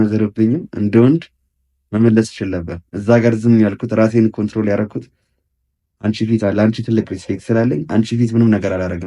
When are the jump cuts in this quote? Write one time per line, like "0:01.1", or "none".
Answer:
none